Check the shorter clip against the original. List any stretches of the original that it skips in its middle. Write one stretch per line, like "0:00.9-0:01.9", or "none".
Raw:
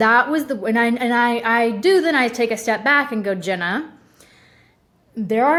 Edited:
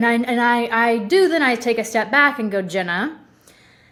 none

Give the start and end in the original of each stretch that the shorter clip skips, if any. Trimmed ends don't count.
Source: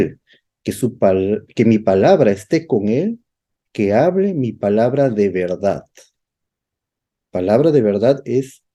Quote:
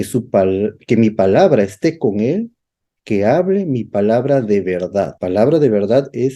0:05.8-0:07.3

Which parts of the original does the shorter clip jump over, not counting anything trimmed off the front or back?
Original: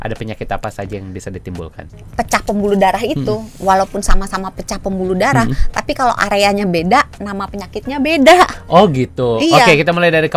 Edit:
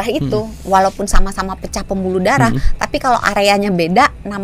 none

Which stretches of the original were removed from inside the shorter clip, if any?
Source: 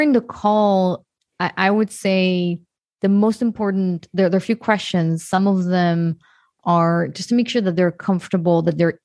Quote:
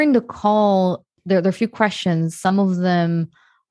0:01.1-0:04.0

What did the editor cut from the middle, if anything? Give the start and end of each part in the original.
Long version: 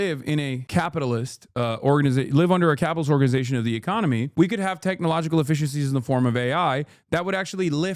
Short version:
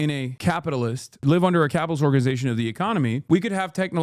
0:01.5-0:02.3

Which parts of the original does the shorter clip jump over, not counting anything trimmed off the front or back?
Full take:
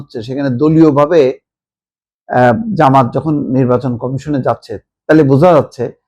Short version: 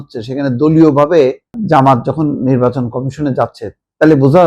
0:01.6-0:02.7

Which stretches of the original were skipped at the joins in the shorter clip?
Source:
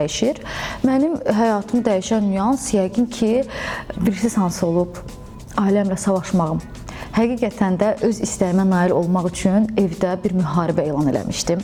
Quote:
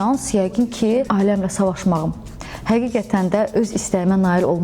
0:03.5-0:05.5

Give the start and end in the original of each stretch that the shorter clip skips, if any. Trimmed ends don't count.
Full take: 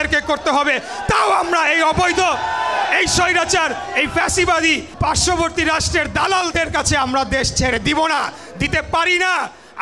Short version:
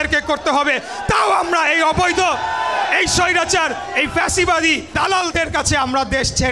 0:04.9-0:06.1

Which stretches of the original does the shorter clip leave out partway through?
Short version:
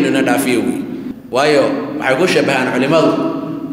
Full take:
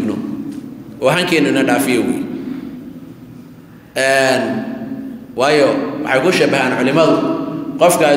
0:02.5-0:05.2

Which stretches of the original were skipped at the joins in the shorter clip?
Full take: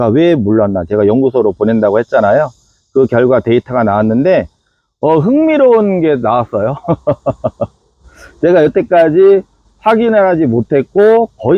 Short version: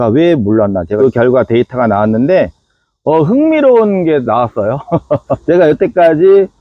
0:00.9-0:02.9
0:07.4-0:08.4

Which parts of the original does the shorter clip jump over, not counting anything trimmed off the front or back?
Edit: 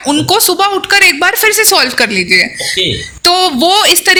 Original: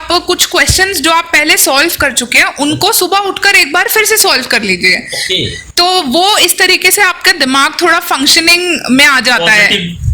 none

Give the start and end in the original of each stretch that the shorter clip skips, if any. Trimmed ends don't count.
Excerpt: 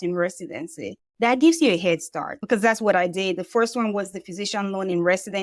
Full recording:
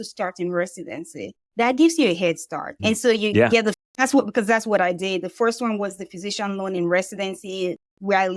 0:02.8-0:04.3

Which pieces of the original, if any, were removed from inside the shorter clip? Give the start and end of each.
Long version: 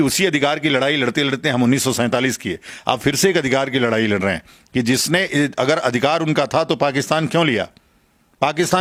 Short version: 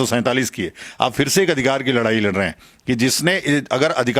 none

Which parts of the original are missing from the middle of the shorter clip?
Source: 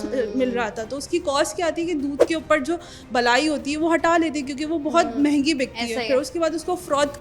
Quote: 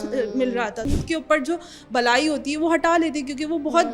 0:01.1-0:02.3

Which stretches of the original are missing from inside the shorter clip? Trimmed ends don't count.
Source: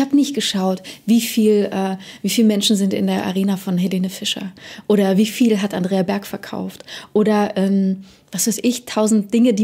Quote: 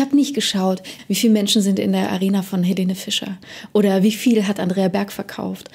0:00.9-0:02.1

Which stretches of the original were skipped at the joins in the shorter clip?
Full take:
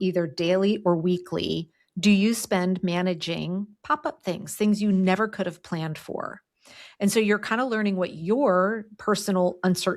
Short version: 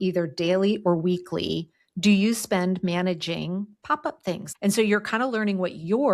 0:04.5-0:06.8

